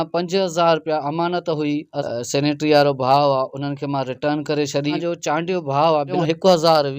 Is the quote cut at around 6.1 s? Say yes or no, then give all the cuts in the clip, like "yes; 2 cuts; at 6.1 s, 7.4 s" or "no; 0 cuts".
yes; 3 cuts; at 2.0 s, 5.0 s, 6.1 s